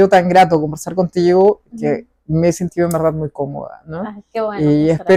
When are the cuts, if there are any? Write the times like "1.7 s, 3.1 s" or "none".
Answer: none

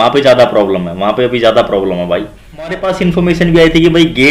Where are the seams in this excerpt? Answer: 2.9 s

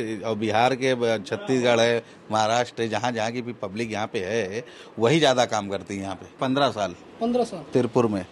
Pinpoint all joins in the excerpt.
6.3 s

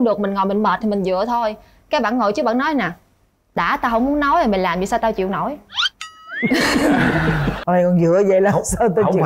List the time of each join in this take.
7.5 s

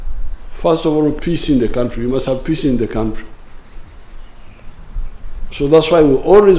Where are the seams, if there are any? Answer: none

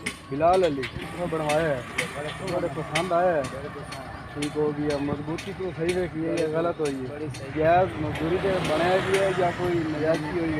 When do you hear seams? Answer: 1.1 s, 7.4 s

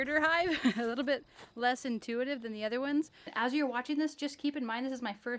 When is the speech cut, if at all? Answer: 3.3 s

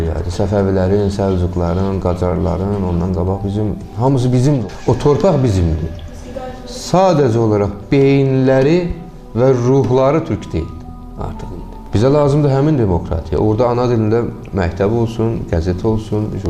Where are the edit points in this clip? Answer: 4.6 s, 11.8 s

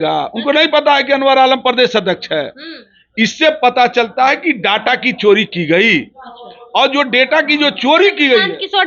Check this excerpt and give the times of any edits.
none

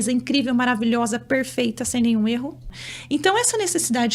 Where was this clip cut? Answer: 2.8 s

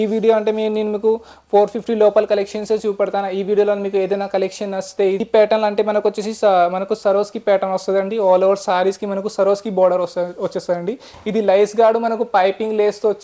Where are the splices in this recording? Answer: 5.2 s

